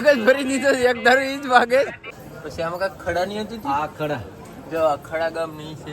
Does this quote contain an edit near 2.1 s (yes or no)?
yes